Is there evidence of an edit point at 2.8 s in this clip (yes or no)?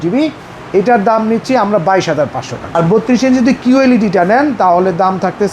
yes